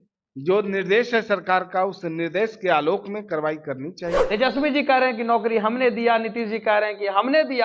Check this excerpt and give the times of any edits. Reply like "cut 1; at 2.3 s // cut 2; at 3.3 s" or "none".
cut 1; at 4.1 s